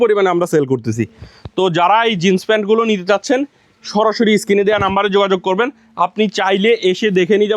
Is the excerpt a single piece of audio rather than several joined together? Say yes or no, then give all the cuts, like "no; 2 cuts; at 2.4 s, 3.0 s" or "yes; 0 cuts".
yes; 0 cuts